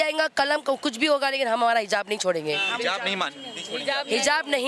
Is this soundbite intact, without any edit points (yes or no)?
yes